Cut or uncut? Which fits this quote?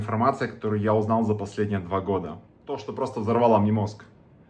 cut